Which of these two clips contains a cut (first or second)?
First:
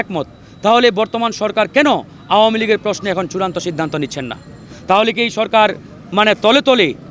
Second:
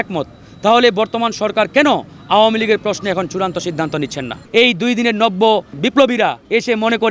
second